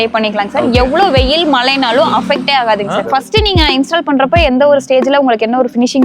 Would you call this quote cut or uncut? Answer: cut